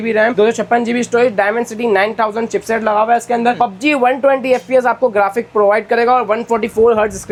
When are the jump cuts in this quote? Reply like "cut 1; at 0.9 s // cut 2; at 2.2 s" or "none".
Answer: none